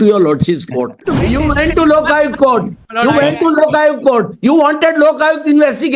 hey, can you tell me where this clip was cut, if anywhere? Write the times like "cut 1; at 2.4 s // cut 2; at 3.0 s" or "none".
cut 1; at 1.0 s